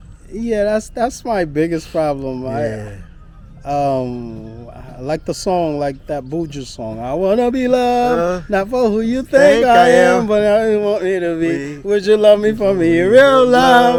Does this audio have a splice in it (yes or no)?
no